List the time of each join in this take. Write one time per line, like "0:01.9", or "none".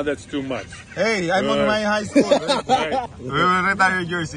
0:03.1